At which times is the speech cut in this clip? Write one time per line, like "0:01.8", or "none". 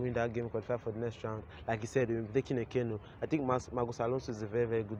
none